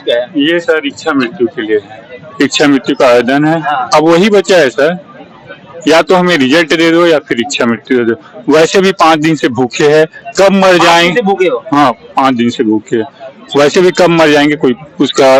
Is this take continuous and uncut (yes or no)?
yes